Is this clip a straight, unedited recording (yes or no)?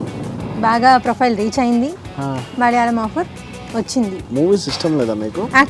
no